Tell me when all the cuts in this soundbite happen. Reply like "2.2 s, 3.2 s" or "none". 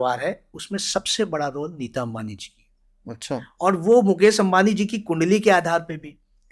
none